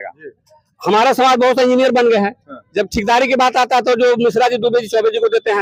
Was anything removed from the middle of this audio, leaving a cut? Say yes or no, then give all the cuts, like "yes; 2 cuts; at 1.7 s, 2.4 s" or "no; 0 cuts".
no; 0 cuts